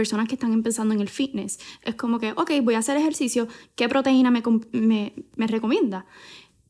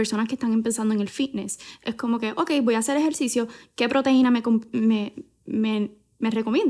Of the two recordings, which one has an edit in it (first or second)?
first